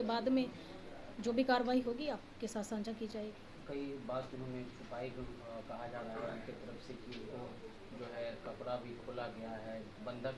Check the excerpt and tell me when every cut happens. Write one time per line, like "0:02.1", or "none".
none